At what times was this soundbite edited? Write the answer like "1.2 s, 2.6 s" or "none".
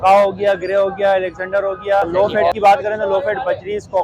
2.1 s